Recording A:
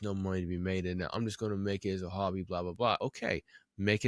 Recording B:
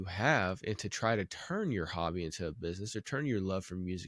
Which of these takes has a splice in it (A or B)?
A